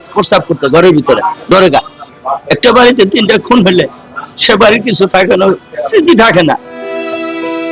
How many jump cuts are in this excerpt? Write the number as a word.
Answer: two